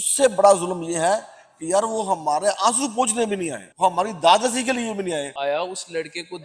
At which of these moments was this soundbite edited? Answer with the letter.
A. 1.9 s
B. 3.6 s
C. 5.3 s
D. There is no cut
C